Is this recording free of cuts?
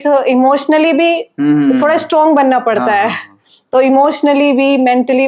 yes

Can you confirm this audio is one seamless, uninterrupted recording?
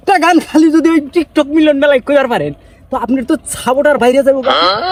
yes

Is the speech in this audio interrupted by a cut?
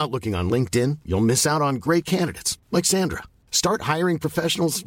no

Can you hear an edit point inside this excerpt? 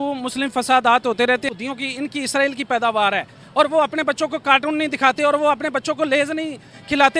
yes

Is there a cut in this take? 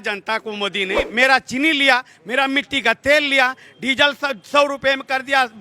yes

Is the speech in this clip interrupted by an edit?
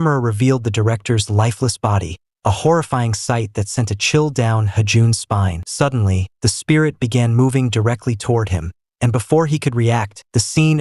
no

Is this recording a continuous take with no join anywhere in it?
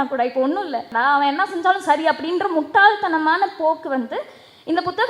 no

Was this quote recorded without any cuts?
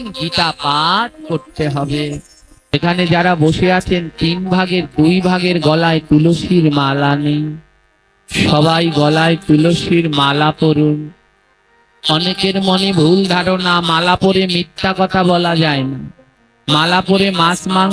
no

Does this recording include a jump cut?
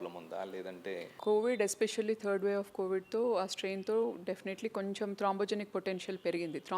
yes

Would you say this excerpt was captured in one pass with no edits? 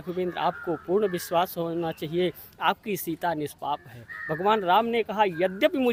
yes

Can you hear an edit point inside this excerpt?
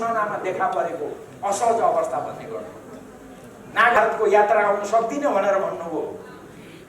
yes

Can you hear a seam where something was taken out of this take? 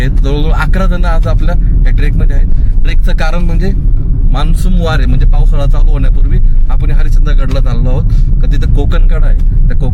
no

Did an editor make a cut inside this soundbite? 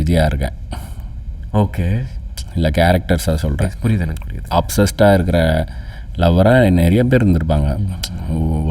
no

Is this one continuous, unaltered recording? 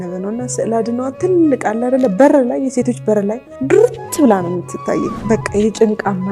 no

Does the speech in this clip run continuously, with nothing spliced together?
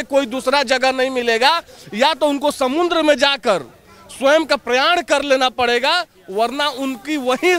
yes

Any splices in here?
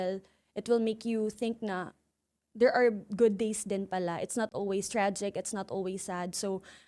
no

